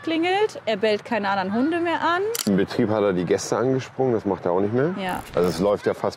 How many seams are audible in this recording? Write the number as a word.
two